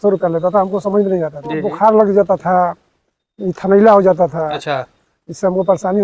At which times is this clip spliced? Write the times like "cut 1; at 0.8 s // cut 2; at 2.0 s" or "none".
cut 1; at 1.7 s